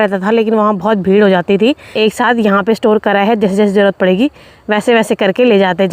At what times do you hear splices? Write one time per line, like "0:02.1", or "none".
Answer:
0:01.9